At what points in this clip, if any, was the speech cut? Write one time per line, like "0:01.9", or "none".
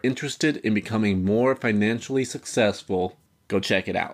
none